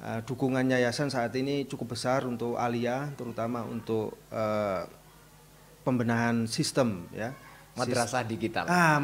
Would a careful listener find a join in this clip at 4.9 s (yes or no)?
no